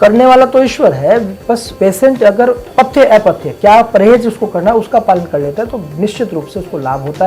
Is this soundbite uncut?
no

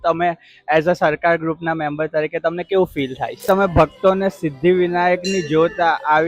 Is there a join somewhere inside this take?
yes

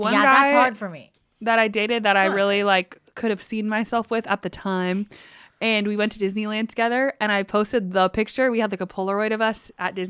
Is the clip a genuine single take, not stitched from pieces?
yes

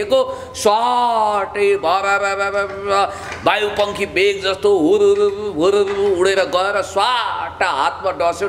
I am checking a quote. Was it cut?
no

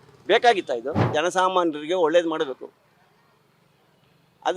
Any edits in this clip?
yes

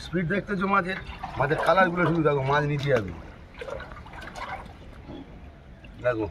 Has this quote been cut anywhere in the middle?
no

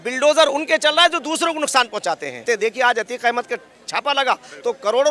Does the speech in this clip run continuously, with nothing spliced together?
no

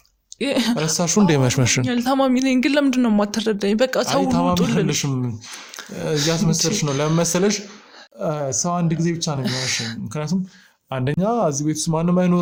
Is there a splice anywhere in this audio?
no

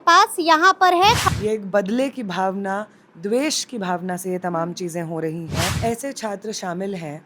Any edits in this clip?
yes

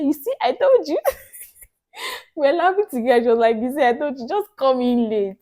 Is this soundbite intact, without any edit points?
yes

